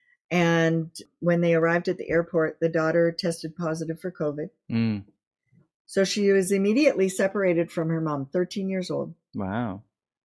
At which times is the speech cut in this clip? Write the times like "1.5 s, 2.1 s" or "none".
1.1 s

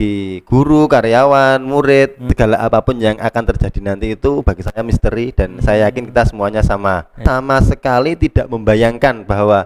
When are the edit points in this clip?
2.2 s, 7.2 s

